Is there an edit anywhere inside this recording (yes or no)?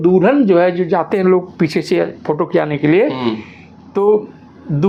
no